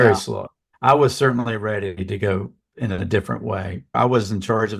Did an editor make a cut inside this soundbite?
no; 0 cuts

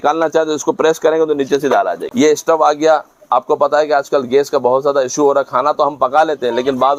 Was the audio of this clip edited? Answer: yes; 1 cut; at 2.0 s

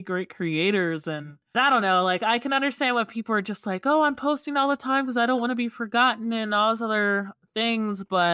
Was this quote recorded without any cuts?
no; 1 cut; at 1.4 s

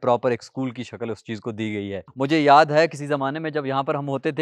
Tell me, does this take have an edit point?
yes; 1 cut; at 2.1 s

